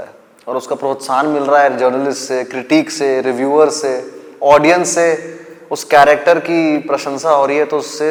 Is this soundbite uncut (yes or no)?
yes